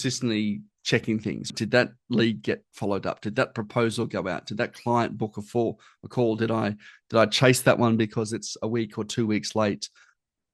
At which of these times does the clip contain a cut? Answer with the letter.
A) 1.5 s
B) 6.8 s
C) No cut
A